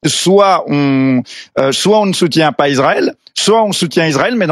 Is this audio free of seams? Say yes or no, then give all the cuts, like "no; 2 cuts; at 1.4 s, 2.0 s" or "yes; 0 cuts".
yes; 0 cuts